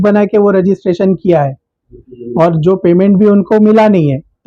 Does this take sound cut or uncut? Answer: uncut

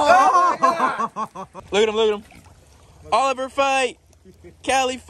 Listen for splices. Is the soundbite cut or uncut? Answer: cut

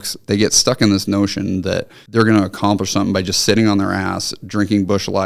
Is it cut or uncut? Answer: cut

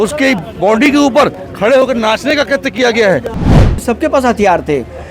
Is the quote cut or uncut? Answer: cut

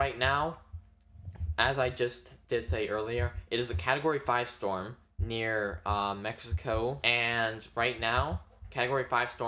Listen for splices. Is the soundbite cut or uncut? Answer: cut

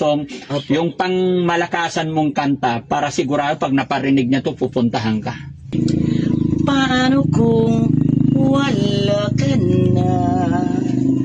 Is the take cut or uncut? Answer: cut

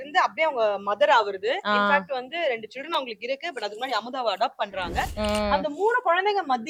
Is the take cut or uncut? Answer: uncut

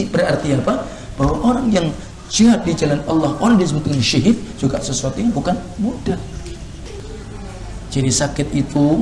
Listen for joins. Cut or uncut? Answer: cut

